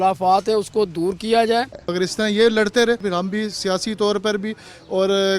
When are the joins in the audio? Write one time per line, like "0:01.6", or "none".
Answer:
0:01.7